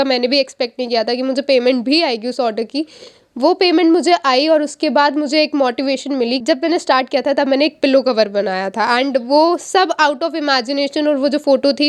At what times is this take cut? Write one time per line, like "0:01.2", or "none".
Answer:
0:06.4